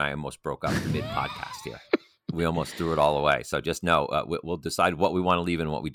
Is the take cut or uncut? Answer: cut